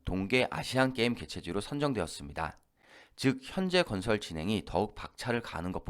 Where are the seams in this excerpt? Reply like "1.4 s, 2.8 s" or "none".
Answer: none